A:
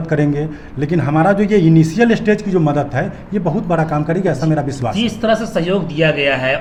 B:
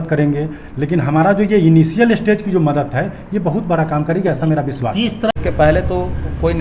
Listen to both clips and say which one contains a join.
B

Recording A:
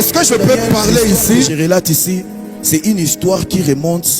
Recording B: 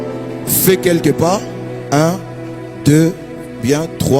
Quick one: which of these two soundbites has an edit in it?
A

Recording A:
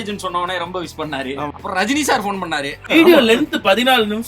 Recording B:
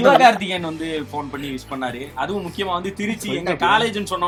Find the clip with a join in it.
A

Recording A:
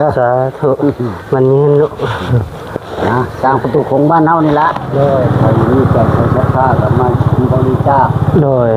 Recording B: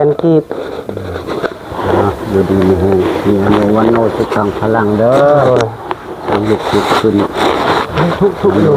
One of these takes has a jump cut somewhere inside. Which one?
A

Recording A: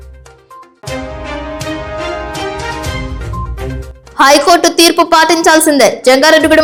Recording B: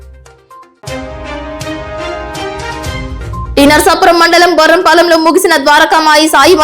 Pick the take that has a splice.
B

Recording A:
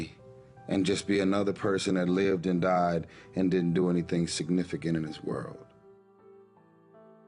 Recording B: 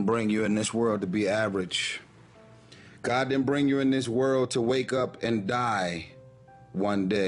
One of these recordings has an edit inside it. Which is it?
A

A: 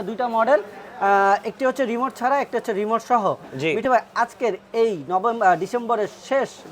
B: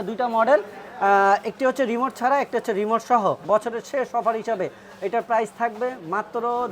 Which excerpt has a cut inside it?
B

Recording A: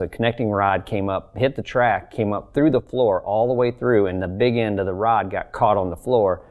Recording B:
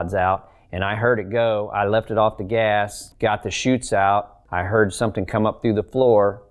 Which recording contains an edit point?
B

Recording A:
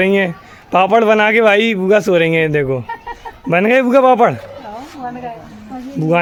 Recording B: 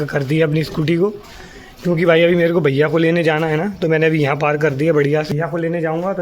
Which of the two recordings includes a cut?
B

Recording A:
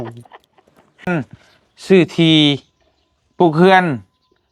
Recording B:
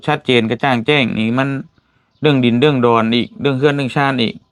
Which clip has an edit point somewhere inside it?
A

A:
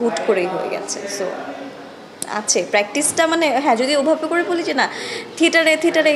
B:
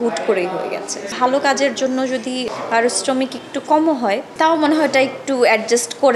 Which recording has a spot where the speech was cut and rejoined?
B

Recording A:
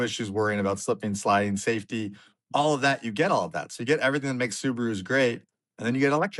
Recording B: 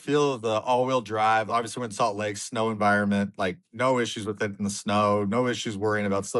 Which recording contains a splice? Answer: B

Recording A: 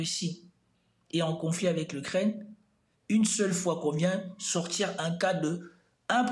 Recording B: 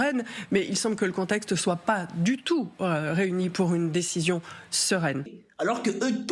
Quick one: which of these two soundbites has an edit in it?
B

